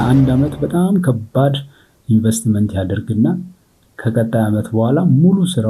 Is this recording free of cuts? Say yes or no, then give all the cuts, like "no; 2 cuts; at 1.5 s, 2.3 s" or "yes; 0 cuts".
yes; 0 cuts